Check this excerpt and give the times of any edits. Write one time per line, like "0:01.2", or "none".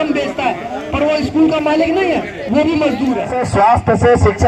0:03.4